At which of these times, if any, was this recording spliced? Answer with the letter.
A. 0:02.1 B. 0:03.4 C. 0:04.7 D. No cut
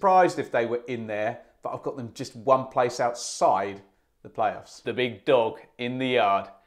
C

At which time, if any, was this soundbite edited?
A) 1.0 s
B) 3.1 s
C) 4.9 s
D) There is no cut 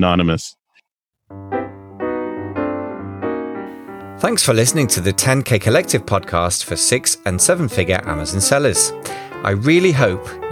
A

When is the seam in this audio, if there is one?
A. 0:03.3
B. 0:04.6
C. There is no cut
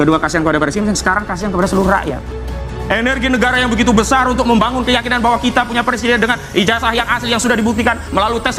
C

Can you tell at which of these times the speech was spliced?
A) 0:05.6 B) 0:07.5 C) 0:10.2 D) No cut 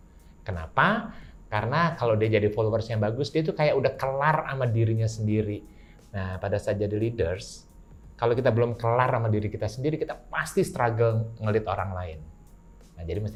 D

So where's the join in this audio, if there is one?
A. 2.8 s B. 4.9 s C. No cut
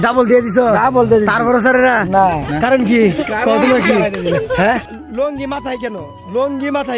B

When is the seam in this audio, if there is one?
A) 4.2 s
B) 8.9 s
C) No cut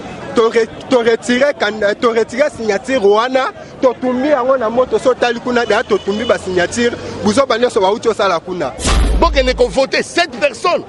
B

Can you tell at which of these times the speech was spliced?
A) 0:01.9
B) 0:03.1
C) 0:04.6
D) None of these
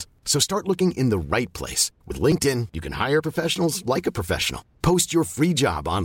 D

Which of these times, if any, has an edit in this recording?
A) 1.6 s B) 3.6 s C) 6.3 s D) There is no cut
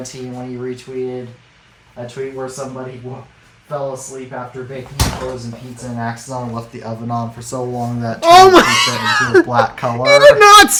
D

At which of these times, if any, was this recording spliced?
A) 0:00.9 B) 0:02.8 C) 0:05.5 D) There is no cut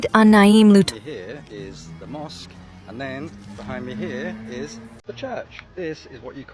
A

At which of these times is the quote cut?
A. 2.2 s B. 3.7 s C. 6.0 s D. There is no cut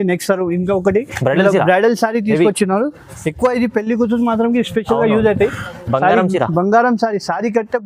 D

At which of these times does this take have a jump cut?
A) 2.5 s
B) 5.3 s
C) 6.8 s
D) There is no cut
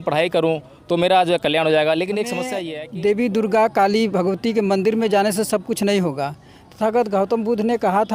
A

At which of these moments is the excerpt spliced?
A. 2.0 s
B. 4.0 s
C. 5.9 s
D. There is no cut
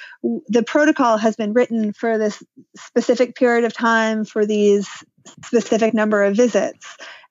A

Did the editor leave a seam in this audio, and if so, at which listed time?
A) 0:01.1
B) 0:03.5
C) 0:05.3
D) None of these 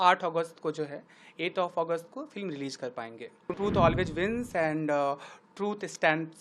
B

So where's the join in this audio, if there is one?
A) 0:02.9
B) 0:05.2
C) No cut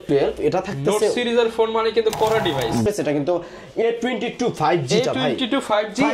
A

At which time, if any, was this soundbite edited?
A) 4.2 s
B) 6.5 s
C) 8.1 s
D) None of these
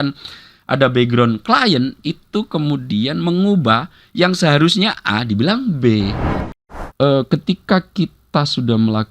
B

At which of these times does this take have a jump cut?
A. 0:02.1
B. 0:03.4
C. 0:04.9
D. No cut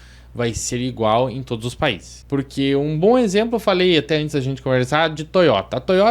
A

